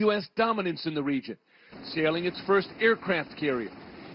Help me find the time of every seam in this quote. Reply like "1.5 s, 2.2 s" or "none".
none